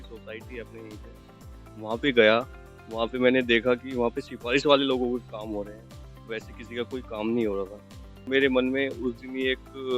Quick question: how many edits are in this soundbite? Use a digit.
1